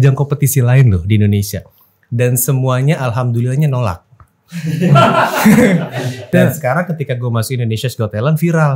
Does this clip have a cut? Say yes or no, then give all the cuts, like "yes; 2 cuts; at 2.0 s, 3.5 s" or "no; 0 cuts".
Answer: yes; 1 cut; at 6.3 s